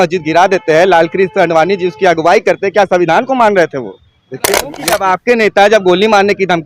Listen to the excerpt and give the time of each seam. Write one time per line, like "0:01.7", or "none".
0:04.7